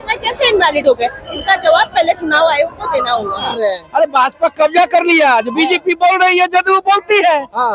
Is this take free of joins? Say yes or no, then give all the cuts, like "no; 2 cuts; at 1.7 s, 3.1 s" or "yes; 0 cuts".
no; 1 cut; at 3.5 s